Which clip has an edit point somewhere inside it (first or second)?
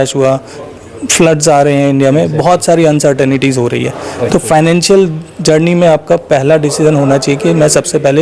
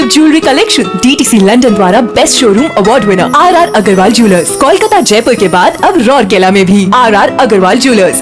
first